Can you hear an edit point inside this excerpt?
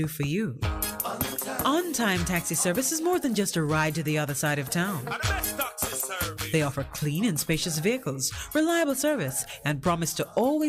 no; 0 cuts

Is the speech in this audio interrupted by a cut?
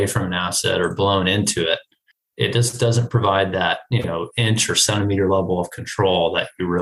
no; 0 cuts

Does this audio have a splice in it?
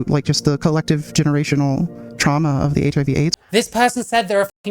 yes; 1 cut; at 3.4 s

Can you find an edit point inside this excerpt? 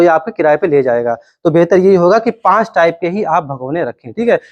no; 0 cuts

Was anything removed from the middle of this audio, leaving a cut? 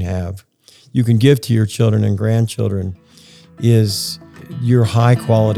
yes; 1 cut; at 4.5 s

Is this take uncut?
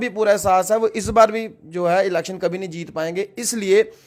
yes; 0 cuts

